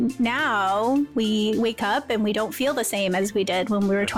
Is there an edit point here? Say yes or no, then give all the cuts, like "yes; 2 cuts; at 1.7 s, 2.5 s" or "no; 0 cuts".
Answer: no; 0 cuts